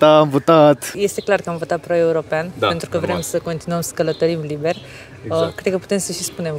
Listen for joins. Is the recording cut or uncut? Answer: cut